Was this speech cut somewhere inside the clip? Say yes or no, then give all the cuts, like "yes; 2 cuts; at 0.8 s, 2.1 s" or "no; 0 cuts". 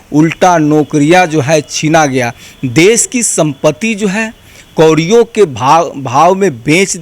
no; 0 cuts